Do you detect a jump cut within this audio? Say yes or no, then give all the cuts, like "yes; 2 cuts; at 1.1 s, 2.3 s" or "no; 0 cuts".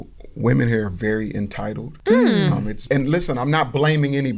yes; 2 cuts; at 1.9 s, 2.8 s